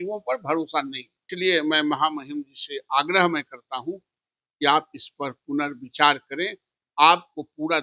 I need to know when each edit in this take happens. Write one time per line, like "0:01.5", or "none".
0:01.3